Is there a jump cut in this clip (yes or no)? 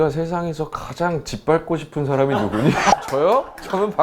yes